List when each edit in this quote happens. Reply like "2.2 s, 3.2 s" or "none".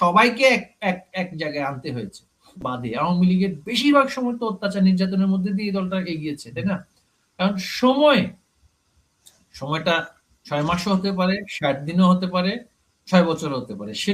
2.7 s